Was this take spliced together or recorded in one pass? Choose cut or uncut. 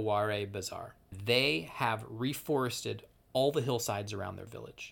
cut